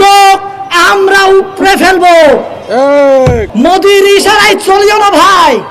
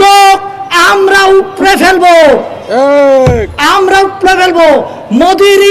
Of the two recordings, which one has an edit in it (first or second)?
first